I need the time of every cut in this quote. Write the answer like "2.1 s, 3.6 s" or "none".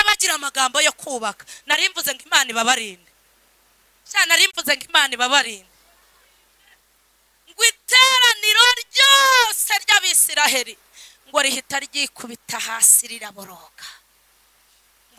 none